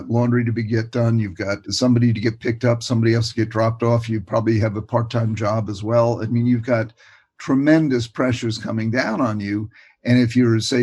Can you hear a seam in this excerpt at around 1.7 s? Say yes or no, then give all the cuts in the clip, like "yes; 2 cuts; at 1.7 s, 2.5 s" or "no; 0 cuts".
yes; 1 cut; at 1.7 s